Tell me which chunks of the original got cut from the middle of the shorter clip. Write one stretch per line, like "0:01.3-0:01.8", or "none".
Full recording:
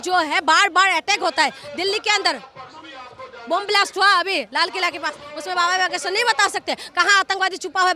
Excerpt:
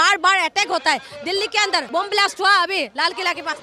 0:02.4-0:03.4